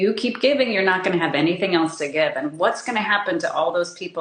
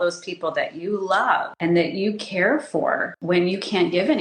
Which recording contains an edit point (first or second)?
second